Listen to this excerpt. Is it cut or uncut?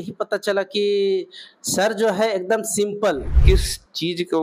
cut